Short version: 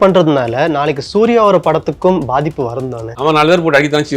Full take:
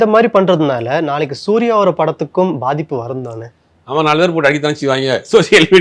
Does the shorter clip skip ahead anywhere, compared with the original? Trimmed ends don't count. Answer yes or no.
yes